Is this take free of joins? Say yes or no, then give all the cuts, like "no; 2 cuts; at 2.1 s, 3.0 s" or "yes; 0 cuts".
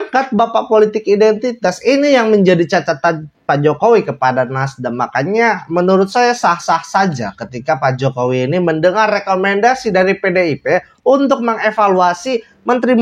yes; 0 cuts